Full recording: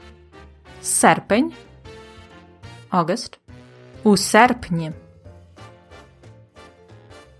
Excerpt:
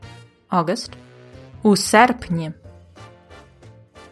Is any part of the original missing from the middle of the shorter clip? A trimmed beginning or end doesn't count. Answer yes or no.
yes